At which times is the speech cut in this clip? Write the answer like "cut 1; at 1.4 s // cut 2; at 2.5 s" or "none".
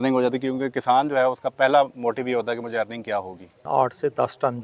cut 1; at 3.6 s